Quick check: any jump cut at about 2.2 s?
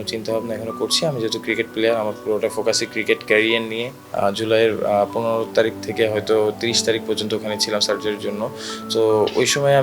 no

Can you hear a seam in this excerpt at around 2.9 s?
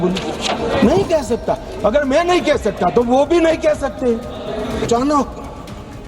no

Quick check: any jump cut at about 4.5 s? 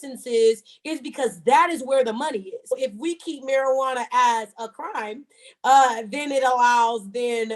no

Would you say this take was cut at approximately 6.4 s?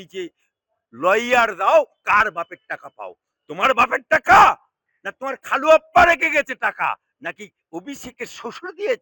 no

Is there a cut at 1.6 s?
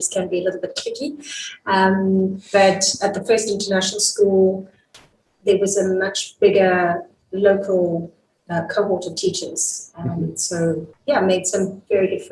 no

